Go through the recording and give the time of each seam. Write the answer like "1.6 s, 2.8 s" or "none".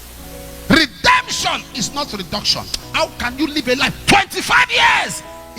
2.8 s